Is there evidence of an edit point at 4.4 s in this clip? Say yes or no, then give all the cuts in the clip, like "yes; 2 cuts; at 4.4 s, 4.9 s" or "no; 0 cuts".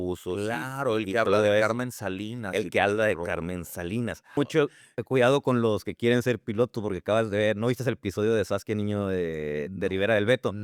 yes; 1 cut; at 4.4 s